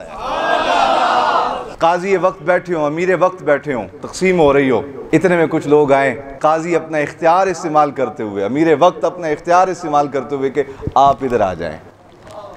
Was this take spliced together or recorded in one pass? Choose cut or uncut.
cut